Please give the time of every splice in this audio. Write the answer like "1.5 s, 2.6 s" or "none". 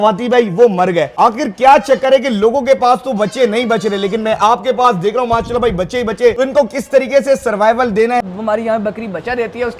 1.1 s, 6.4 s, 8.2 s

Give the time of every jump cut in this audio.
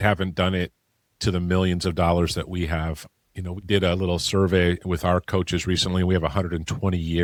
none

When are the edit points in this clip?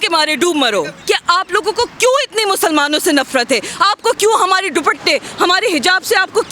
1.0 s

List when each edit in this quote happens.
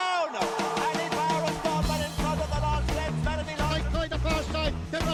none

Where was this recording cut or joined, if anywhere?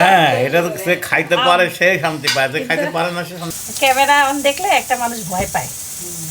3.5 s

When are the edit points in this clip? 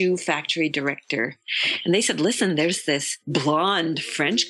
1.4 s

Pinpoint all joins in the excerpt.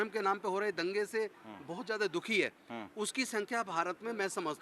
none

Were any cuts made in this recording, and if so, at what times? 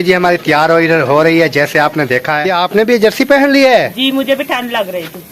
2.3 s

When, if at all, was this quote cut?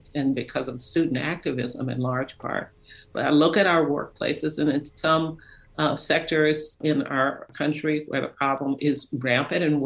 7.1 s

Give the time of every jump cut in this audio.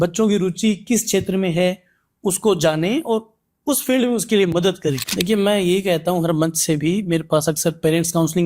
5.0 s

